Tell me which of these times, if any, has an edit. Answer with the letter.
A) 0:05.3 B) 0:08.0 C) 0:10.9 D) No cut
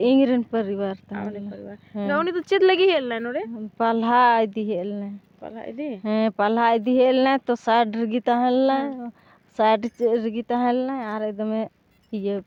D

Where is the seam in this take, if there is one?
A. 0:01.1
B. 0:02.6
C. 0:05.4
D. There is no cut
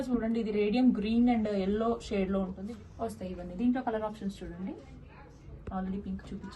B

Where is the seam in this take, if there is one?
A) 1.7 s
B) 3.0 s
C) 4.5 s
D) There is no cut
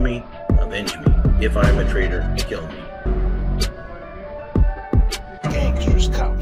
D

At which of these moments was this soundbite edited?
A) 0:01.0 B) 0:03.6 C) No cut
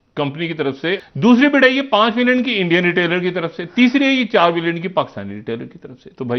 A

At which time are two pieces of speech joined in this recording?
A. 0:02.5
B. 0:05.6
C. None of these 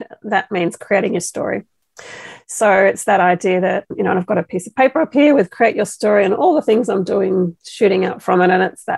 C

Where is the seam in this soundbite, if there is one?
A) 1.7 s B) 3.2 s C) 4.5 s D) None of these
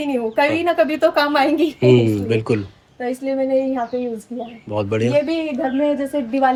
D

